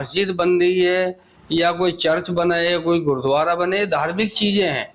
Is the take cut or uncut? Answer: uncut